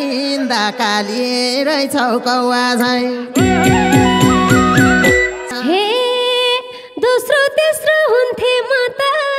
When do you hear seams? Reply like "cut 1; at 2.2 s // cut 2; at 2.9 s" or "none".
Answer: cut 1; at 5.4 s